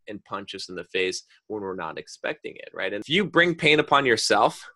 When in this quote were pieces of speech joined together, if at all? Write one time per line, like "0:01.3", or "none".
0:03.0